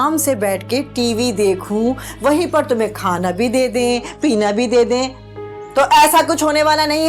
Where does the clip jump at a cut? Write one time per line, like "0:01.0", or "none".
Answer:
none